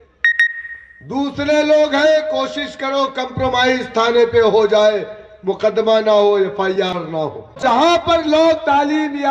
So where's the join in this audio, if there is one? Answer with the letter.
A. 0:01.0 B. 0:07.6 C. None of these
B